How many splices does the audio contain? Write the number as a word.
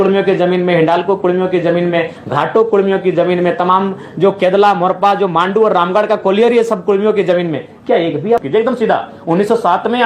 one